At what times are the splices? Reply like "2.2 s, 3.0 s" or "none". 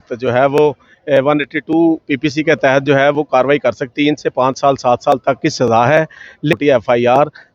3.9 s, 6.6 s

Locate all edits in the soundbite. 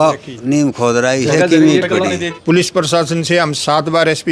2.3 s

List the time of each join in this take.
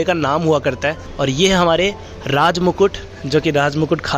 1.1 s

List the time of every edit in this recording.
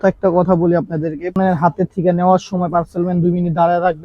1.4 s

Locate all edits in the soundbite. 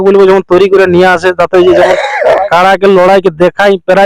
none

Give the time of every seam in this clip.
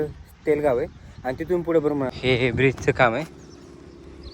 2.1 s

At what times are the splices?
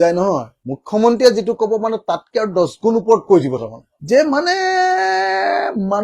3.9 s

